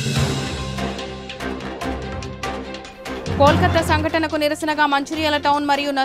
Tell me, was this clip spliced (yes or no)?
yes